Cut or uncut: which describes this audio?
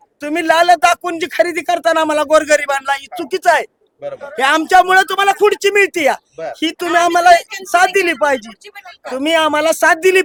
uncut